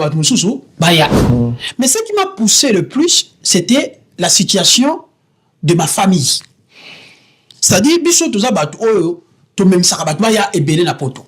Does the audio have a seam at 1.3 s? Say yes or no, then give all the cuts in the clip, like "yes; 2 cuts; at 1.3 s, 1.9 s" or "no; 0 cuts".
yes; 1 cut; at 1.3 s